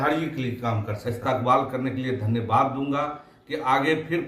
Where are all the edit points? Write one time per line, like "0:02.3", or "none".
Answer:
0:00.9